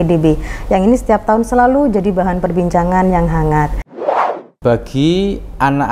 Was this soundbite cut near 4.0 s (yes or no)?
yes